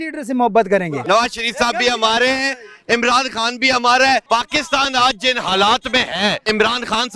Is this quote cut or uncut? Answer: cut